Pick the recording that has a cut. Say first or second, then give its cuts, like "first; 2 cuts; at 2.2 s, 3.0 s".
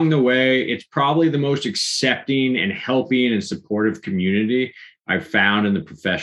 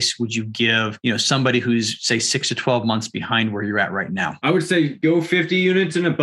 second; 3 cuts; at 0.9 s, 4.4 s, 4.9 s